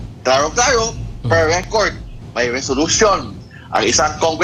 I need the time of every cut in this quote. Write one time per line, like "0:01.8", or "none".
none